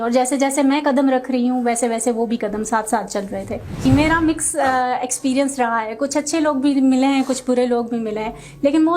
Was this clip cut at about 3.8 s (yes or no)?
yes